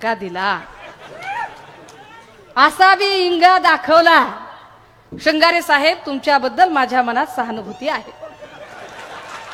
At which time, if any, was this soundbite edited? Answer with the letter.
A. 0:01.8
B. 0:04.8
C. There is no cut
C